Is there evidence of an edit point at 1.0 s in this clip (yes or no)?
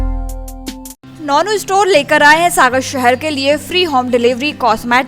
no